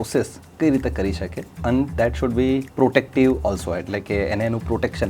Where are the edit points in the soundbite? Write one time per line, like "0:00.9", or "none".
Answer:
0:02.7